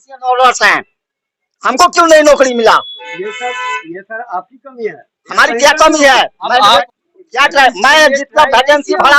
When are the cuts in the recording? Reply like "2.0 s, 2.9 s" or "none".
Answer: 6.8 s